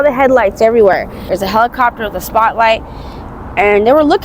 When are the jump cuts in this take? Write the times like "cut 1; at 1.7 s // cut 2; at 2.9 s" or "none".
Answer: cut 1; at 1.1 s